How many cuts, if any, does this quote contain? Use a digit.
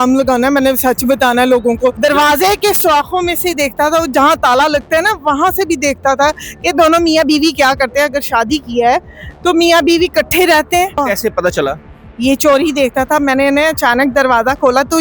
2